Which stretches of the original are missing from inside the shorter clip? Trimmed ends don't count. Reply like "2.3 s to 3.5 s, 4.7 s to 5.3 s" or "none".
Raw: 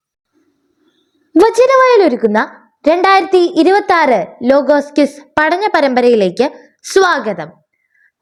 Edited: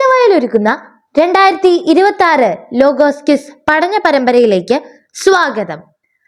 none